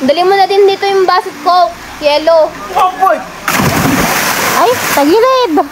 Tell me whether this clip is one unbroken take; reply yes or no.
yes